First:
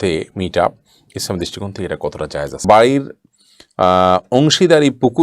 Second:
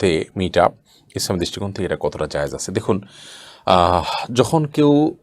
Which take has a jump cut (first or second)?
first